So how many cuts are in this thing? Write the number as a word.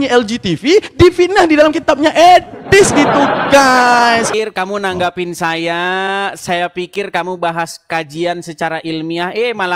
one